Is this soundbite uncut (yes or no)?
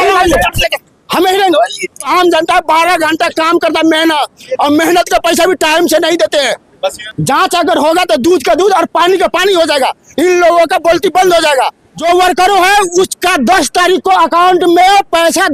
no